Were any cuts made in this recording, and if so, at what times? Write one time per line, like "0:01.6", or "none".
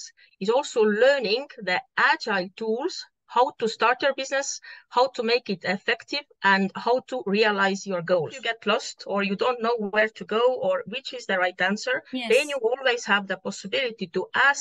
0:08.4

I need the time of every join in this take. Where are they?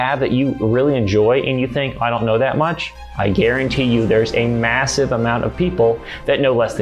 none

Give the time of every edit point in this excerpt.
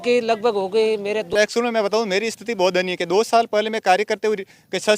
0:01.3

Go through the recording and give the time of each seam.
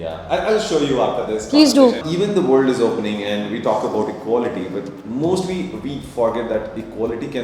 0:02.0

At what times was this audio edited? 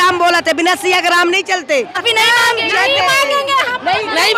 0:02.0

